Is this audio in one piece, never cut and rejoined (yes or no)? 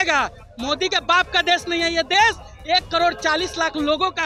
yes